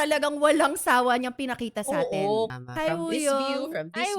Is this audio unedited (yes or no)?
no